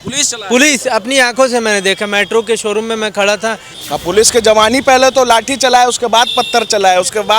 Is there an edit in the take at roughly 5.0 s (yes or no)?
no